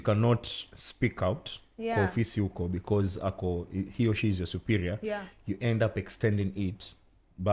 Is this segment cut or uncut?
uncut